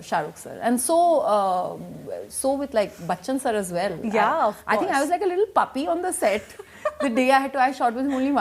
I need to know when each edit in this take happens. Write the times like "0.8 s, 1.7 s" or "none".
none